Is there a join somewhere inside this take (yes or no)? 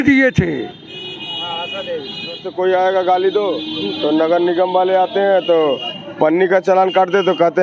yes